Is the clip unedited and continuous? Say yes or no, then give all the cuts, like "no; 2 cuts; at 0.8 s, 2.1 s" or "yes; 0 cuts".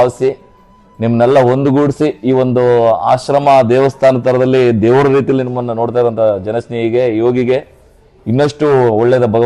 yes; 0 cuts